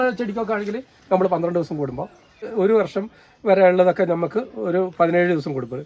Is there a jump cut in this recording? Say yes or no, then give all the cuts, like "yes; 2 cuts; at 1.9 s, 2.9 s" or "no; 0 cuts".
yes; 1 cut; at 2.5 s